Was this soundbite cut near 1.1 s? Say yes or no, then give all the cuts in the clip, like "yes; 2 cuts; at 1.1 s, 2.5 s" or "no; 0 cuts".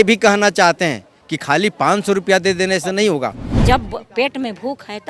no; 1 cut; at 3.5 s